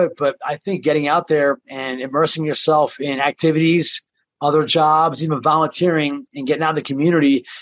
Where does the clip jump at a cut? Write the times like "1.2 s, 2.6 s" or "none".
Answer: none